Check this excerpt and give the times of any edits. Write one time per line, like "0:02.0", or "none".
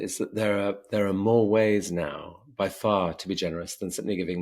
none